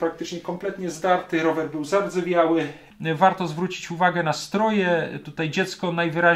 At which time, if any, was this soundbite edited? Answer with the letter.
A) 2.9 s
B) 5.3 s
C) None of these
A